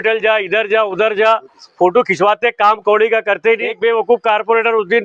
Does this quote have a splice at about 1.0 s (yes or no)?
no